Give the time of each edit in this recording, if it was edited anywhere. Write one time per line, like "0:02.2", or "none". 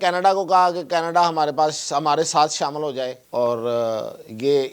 0:03.2